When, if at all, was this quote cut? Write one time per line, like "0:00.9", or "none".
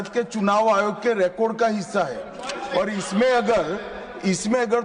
none